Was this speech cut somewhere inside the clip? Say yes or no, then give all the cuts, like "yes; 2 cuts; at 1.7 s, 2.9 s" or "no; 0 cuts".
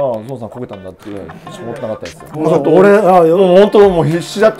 no; 0 cuts